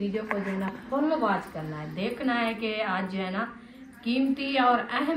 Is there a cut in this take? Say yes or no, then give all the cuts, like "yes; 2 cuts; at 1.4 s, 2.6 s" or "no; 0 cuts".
no; 0 cuts